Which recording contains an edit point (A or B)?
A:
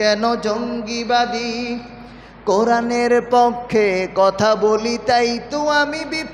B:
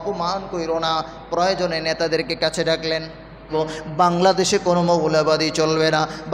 B